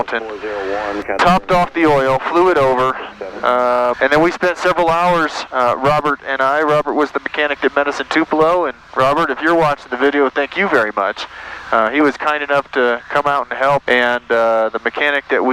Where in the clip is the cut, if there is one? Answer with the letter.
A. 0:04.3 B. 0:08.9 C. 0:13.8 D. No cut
C